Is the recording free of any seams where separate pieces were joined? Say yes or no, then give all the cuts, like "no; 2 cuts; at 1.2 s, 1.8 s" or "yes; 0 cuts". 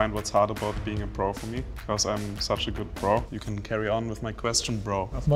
no; 2 cuts; at 1.7 s, 3.4 s